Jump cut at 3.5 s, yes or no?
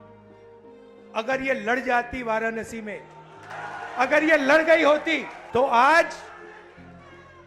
yes